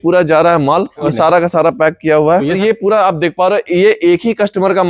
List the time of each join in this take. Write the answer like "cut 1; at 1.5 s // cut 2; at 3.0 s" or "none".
cut 1; at 1.1 s // cut 2; at 2.6 s